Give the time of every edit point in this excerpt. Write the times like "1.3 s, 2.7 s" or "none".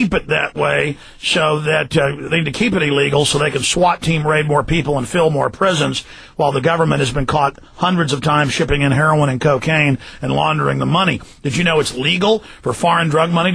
8.1 s